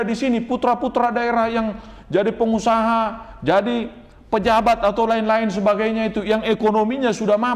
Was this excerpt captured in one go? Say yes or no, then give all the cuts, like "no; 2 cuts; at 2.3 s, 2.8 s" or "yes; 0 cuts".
yes; 0 cuts